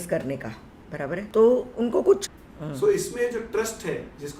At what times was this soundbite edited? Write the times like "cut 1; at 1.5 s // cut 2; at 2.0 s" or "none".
cut 1; at 1.3 s // cut 2; at 2.4 s